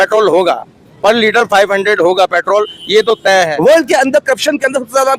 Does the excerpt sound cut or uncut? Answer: cut